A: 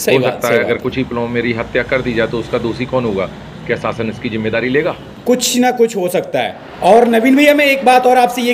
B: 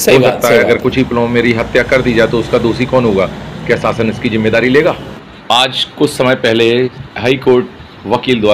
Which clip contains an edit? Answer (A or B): B